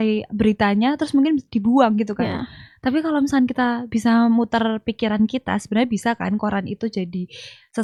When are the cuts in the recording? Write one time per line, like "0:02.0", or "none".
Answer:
none